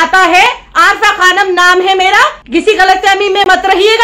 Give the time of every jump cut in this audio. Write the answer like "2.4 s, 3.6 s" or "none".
2.4 s